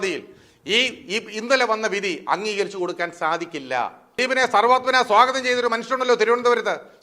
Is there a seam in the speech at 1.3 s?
no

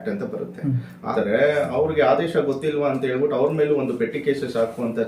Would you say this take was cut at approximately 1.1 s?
yes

